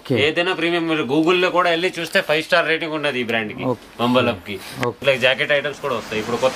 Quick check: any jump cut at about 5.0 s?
yes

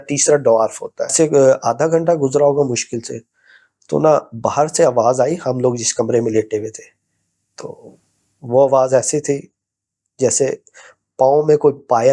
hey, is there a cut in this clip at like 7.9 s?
no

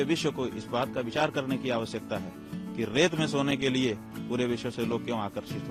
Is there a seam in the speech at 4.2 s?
no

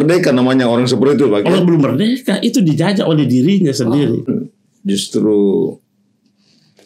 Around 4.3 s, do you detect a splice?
yes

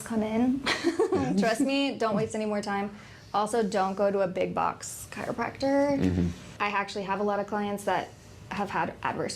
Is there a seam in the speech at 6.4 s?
yes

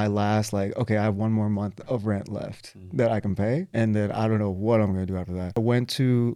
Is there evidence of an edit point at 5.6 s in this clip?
yes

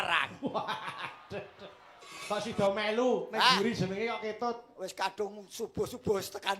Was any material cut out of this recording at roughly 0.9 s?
no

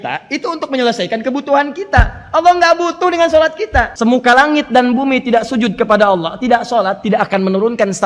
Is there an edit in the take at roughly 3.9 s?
yes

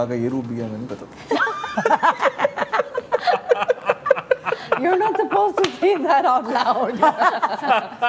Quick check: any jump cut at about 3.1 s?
no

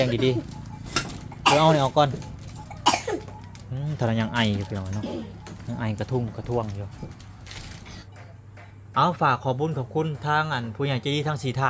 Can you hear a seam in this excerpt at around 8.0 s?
yes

